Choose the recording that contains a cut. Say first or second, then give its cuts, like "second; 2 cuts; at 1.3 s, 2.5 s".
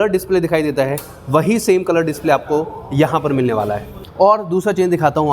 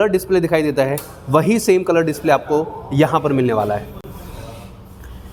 first; 1 cut; at 4.0 s